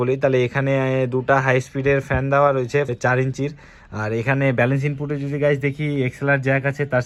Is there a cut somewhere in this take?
no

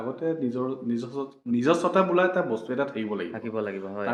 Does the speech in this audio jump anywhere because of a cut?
no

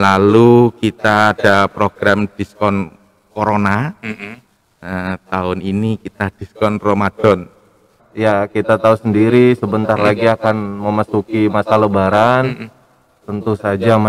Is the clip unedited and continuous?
no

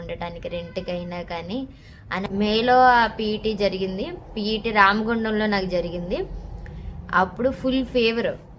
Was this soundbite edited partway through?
yes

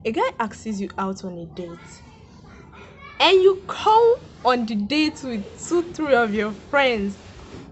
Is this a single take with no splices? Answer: yes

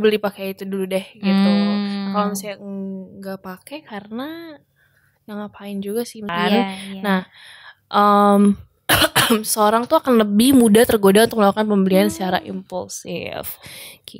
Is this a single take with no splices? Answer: no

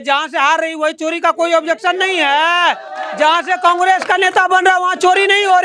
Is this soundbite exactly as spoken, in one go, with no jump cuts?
yes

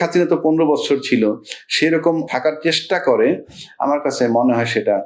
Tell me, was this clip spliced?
yes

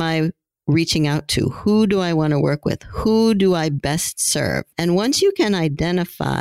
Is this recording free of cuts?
no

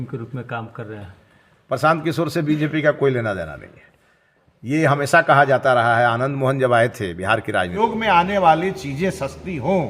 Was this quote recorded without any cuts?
no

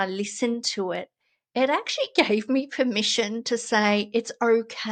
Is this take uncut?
yes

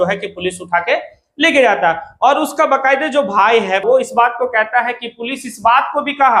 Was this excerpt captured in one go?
no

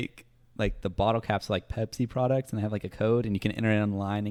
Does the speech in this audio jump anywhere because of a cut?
no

